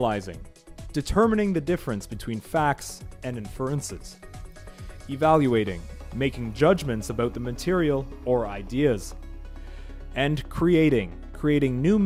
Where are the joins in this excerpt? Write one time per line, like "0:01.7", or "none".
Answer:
none